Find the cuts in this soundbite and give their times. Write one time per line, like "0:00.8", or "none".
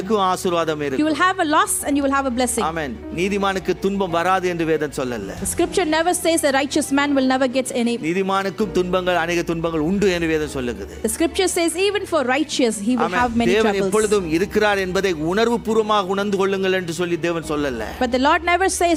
none